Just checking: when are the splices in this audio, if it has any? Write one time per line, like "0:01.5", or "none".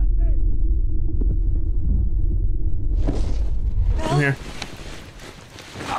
none